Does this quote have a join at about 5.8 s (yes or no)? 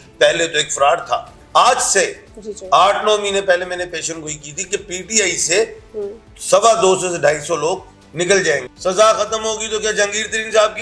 no